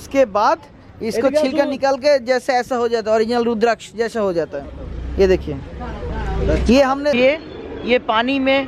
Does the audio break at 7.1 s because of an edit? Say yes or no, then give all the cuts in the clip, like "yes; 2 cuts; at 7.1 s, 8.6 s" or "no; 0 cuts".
yes; 1 cut; at 7.1 s